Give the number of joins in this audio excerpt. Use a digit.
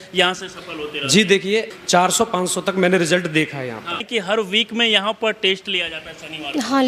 2